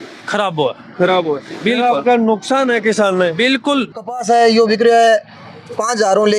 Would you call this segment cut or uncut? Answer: cut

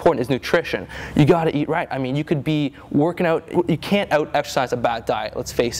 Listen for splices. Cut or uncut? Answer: cut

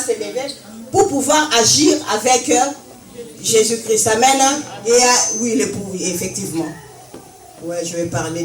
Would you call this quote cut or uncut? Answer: cut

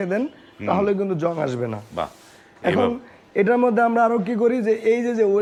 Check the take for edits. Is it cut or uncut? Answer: uncut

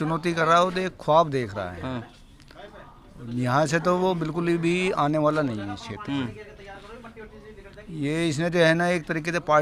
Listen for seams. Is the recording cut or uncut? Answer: uncut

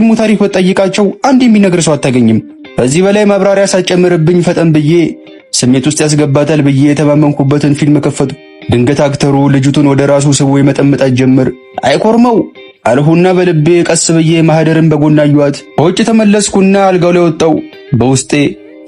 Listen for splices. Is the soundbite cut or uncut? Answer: cut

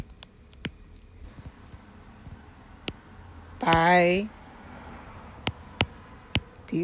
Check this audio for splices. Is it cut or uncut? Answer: cut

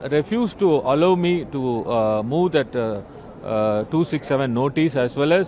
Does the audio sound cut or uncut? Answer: uncut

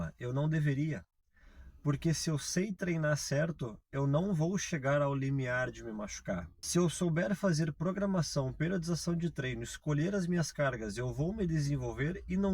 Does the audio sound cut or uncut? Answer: cut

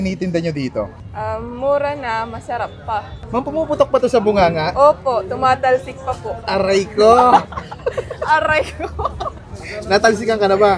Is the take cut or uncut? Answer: uncut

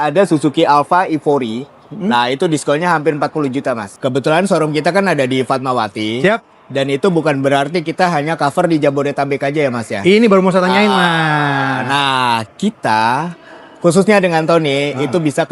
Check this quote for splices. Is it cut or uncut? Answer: cut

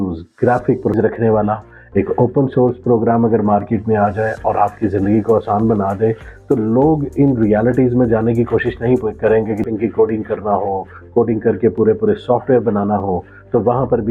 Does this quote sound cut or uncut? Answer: cut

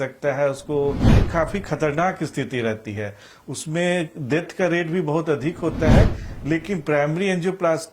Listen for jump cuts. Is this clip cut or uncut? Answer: cut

